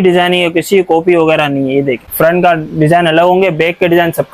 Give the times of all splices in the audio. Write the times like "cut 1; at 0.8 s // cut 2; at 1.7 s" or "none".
cut 1; at 2.0 s